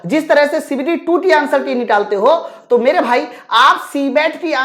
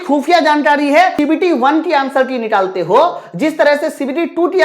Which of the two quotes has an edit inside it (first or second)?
second